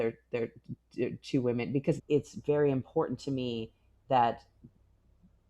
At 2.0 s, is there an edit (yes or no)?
yes